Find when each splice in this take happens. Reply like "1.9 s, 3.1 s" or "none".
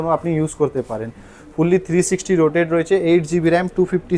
none